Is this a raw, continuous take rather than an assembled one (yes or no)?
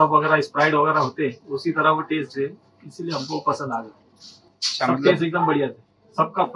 yes